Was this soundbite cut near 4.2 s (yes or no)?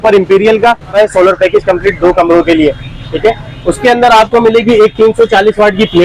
no